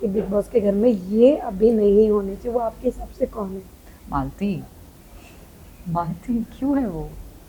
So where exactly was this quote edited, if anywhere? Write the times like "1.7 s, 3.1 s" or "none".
none